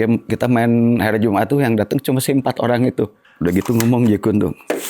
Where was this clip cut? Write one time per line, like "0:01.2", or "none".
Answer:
0:03.2